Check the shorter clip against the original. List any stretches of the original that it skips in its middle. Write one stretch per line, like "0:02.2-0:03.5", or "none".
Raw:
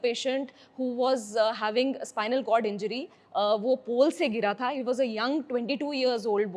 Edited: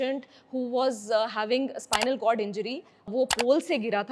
0:03.3-0:03.6